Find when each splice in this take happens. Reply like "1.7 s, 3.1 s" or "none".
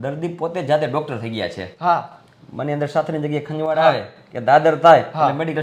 none